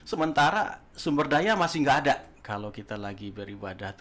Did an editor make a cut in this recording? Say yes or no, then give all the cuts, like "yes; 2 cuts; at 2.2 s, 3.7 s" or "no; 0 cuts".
yes; 1 cut; at 2.4 s